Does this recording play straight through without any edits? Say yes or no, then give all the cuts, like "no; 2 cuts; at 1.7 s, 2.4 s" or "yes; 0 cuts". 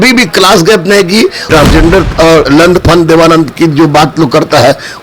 no; 1 cut; at 1.4 s